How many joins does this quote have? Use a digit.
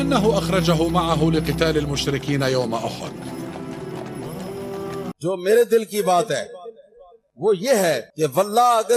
1